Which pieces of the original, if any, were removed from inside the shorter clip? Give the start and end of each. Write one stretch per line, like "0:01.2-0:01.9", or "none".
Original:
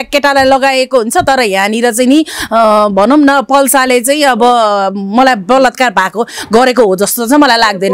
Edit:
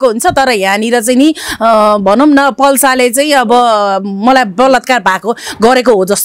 none